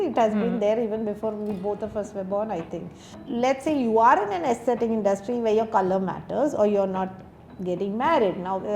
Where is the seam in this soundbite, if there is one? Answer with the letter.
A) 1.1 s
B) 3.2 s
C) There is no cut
B